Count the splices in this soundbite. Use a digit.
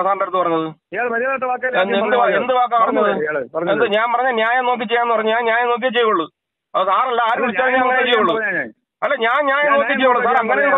0